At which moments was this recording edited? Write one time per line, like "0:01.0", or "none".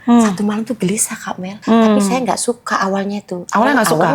0:01.6